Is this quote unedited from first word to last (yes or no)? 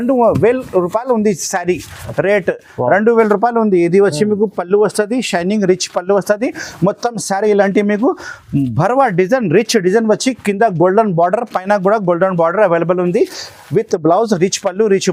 yes